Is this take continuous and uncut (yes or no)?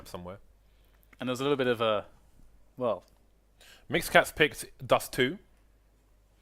no